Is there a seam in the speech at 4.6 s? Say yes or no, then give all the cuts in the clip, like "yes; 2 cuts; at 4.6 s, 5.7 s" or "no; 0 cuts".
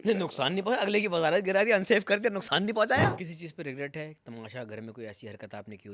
no; 1 cut; at 3.2 s